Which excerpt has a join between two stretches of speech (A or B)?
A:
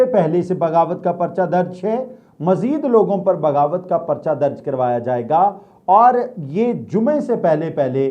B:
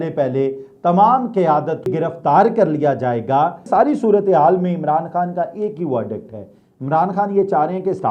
B